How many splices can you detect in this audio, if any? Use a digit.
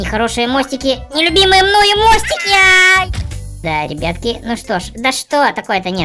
1